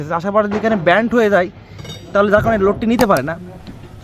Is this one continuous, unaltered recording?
yes; 0 cuts

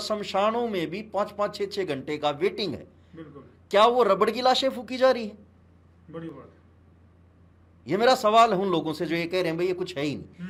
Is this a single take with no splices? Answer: yes; 0 cuts

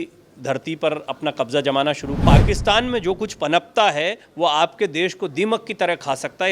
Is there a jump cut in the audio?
yes; 1 cut; at 2.2 s

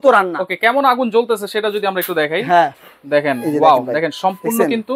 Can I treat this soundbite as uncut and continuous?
yes; 0 cuts

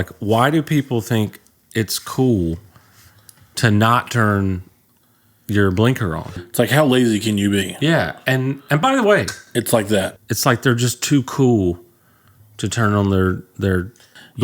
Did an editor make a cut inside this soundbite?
yes; 2 cuts; at 6.4 s, 10.2 s

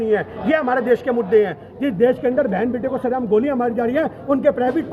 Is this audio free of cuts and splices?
yes; 0 cuts

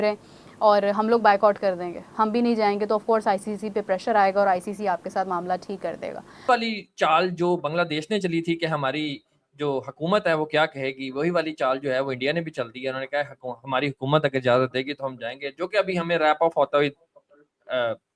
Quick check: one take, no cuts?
no; 1 cut; at 6.5 s

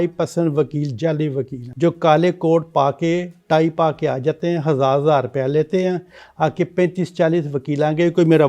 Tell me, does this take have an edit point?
yes; 1 cut; at 1.6 s

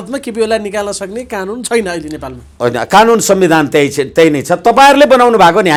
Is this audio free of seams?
yes; 0 cuts

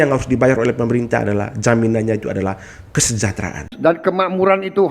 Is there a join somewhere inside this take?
yes; 1 cut; at 3.7 s

